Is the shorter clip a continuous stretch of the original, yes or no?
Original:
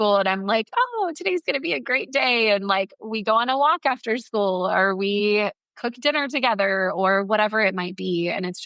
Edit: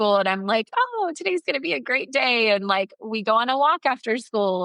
yes